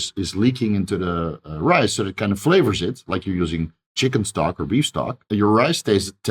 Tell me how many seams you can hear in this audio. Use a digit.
1